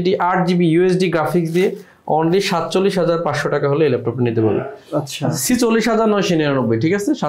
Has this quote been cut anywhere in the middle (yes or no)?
no